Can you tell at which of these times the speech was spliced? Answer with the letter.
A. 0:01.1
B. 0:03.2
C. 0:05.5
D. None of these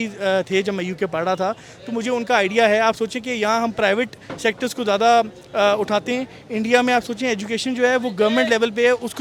D